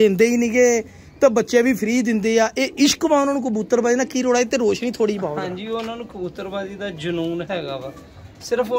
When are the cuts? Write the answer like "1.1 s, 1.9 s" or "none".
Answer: none